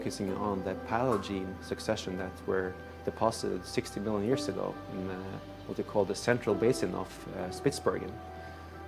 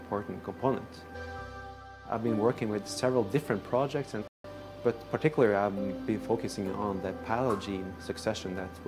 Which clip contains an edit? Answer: second; 2 cuts; at 1.1 s, 4.3 s

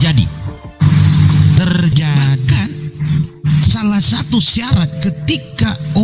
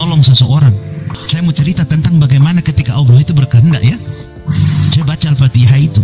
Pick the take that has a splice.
first; 1 cut; at 2.5 s

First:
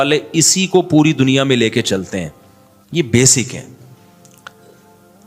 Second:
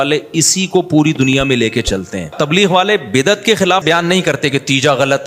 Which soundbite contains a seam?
second; 2 cuts; at 2.3 s, 3.8 s

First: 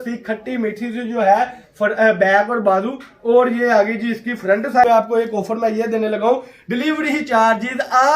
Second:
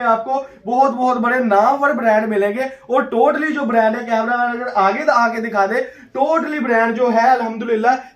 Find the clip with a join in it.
first; 1 cut; at 4.9 s

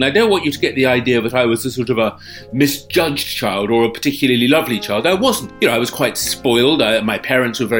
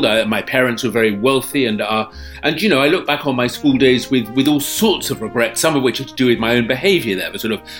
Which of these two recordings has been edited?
first; 1 cut; at 5.4 s

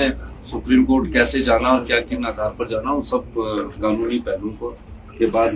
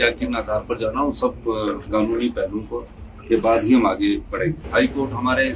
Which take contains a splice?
second; 1 cut; at 4.6 s

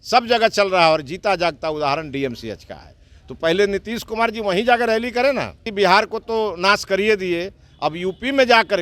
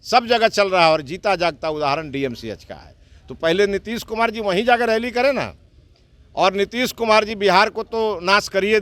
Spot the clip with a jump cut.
first; 1 cut; at 5.7 s

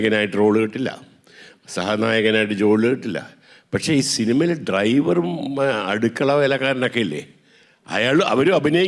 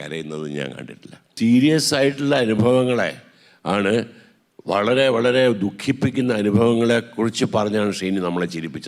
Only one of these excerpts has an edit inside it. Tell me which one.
second; 1 cut; at 1.3 s

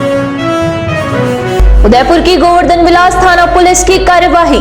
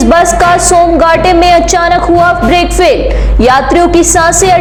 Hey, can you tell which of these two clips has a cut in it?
first; 1 cut; at 1.5 s

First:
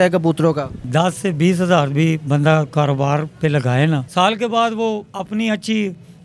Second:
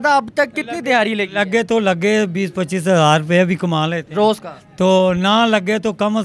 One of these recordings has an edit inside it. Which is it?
first; 2 cuts; at 0.9 s, 4.0 s

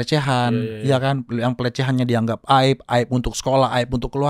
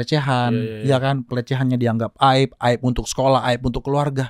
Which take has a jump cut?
second; 1 cut; at 1.3 s

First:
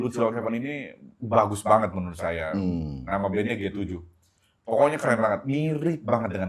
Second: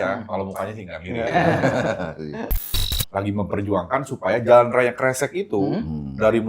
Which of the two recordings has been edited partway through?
second; 1 cut; at 2.7 s

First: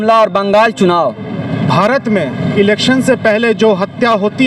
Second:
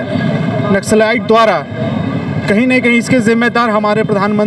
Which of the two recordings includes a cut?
first; 1 cut; at 1.5 s

